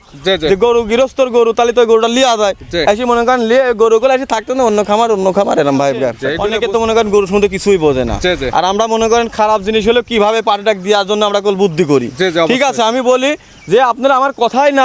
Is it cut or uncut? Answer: cut